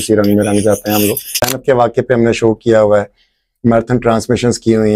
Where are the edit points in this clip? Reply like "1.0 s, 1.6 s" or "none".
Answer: 1.5 s